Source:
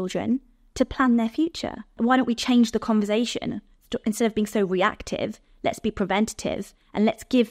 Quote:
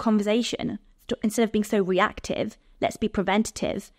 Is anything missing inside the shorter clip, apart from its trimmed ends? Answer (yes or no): no